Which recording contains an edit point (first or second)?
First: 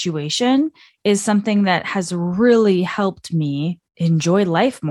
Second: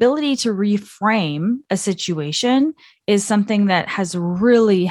first